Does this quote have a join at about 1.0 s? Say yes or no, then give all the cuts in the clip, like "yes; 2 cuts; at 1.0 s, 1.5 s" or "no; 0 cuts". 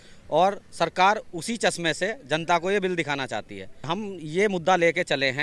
no; 1 cut; at 3.9 s